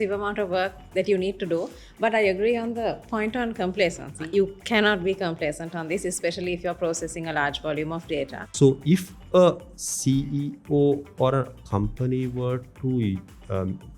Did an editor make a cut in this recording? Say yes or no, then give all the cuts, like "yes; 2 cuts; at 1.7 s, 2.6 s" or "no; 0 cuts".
yes; 2 cuts; at 4.2 s, 8.4 s